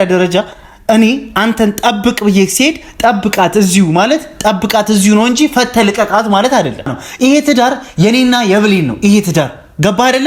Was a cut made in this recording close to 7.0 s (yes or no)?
yes